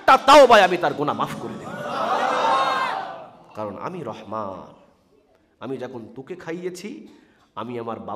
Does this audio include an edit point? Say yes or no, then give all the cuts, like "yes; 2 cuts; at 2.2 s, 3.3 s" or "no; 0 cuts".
no; 0 cuts